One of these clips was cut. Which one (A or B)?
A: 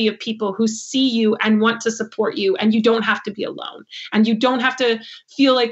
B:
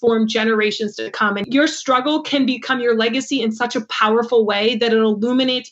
B